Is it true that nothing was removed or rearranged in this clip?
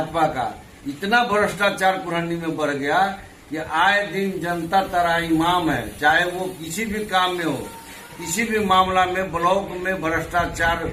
yes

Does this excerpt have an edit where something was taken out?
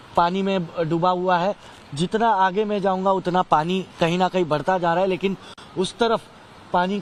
no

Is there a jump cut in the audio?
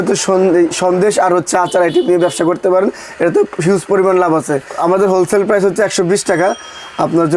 no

